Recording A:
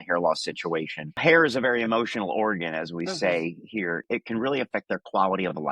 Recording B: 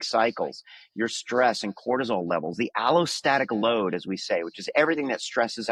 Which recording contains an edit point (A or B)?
A